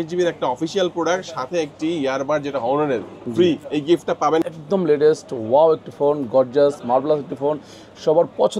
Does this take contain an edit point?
yes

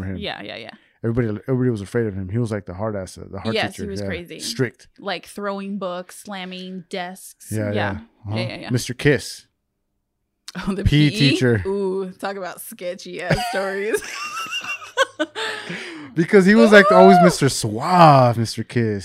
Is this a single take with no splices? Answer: yes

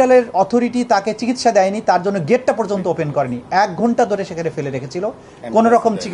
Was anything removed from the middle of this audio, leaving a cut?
no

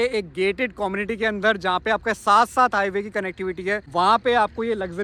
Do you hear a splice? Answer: no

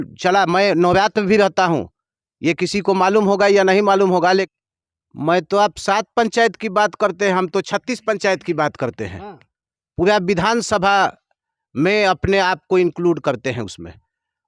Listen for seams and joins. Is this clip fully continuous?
no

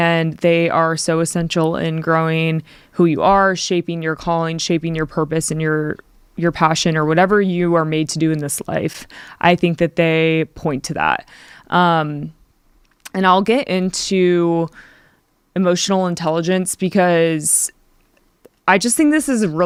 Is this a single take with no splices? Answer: yes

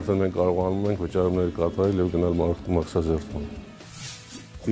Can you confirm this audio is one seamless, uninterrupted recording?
yes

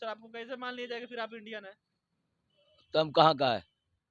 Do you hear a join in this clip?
no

